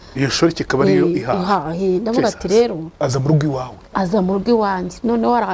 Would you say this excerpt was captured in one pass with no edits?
no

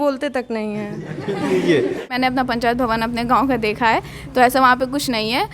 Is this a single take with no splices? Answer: no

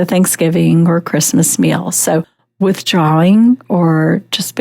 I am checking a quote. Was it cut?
yes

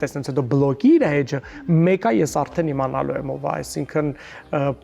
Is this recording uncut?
yes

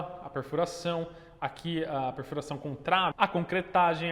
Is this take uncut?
no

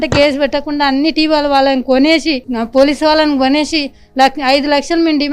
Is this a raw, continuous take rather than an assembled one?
yes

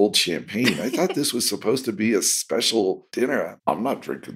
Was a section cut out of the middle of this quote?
yes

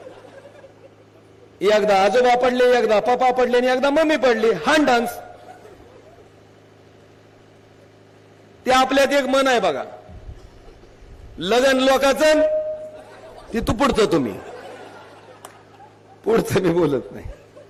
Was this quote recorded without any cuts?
yes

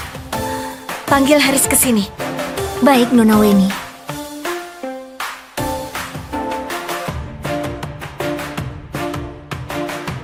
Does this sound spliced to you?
no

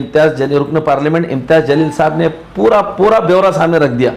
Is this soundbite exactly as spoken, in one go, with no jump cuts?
yes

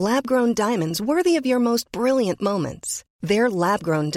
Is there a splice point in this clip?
no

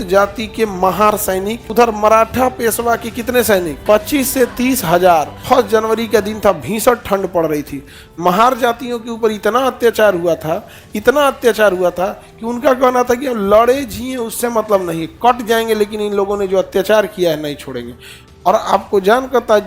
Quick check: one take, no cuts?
no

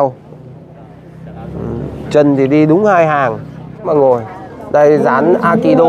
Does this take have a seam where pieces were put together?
yes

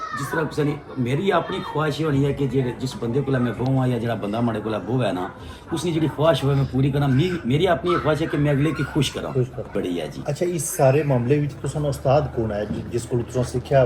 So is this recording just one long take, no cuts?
no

